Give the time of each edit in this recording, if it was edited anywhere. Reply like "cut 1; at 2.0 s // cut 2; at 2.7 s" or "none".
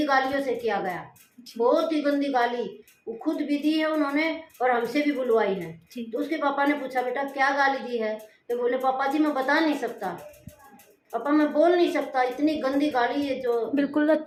none